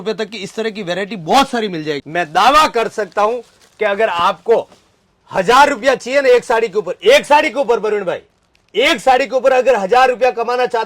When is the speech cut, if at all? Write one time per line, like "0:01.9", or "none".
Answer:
0:02.0